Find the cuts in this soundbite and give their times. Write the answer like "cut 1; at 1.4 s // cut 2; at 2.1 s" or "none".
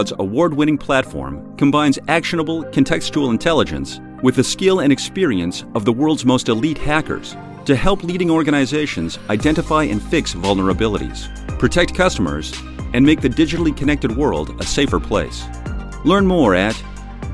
none